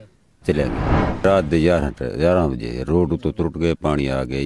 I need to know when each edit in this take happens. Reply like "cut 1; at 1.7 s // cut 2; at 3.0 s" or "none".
cut 1; at 1.2 s